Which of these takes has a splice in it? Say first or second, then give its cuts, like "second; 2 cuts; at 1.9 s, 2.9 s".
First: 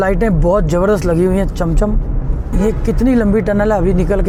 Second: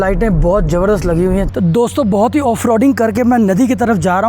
second; 1 cut; at 1.5 s